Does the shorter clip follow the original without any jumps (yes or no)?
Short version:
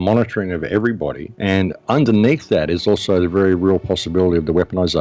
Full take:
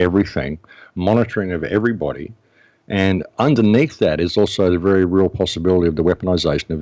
no